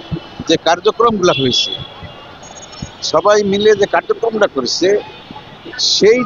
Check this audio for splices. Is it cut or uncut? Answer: uncut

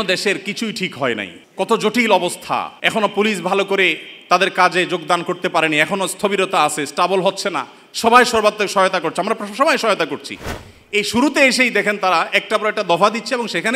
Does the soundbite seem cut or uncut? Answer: cut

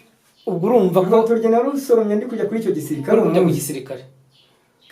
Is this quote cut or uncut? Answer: uncut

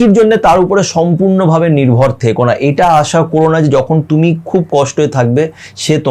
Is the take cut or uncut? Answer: uncut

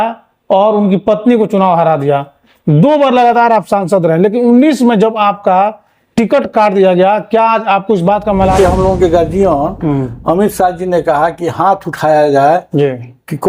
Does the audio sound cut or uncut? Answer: cut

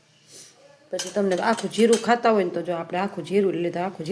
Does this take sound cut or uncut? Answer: uncut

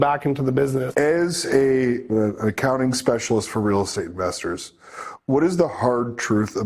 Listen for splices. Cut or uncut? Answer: cut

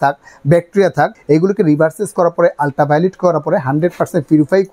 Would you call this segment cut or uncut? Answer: cut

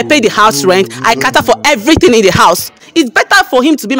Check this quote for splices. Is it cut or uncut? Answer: cut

